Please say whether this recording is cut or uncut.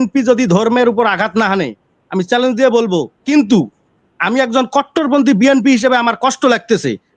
cut